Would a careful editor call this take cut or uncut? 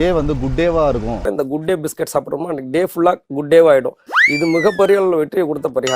cut